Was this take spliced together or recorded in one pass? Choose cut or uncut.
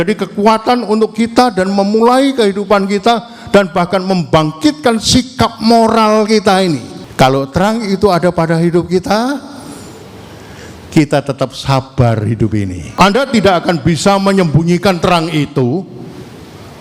cut